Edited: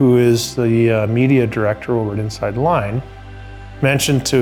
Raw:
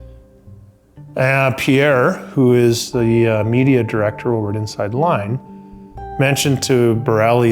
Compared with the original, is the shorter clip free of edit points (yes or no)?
yes